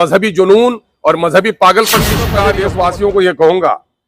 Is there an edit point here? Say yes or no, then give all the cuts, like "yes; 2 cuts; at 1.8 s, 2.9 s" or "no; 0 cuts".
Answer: yes; 1 cut; at 2.4 s